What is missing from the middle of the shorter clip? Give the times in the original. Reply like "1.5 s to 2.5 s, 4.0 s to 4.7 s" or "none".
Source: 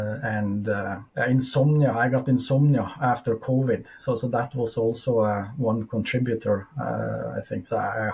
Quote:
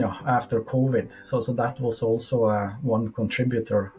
none

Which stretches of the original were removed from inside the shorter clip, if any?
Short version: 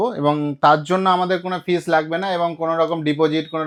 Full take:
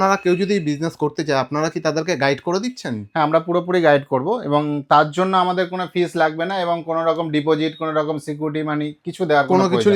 none

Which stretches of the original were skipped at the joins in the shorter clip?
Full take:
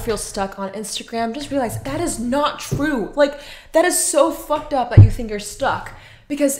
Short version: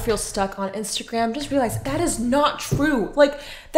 none

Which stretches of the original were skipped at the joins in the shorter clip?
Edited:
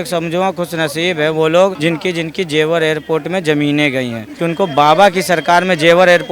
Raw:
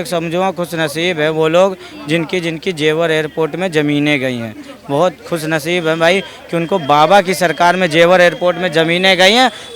1.8 s to 2.0 s, 4.5 s to 6.4 s

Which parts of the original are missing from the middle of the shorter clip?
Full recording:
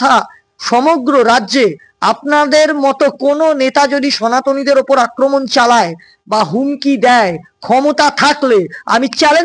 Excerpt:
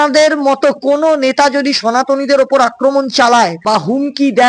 6.0 s to 6.2 s

